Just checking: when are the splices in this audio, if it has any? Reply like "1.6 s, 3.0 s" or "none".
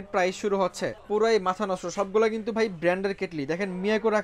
1.0 s